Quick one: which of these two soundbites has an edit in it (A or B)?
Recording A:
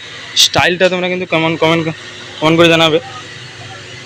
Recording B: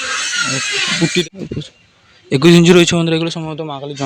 B